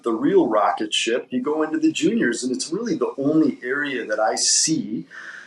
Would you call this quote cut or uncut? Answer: uncut